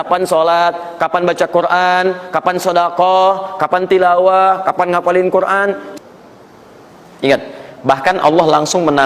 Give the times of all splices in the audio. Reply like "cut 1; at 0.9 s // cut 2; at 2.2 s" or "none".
cut 1; at 5.9 s